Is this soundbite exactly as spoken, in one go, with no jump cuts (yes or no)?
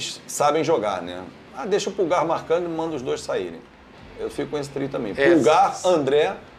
yes